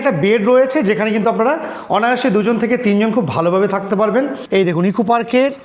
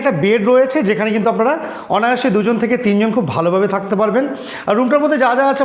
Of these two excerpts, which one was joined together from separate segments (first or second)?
first